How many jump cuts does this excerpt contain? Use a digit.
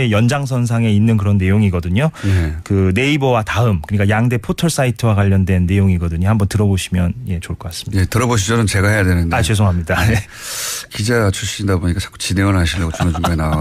0